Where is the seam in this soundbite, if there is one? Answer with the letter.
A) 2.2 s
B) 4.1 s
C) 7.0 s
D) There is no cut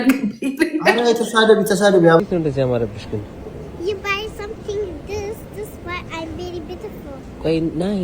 A